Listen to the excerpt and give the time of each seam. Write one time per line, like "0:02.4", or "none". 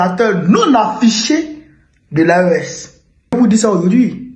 0:03.3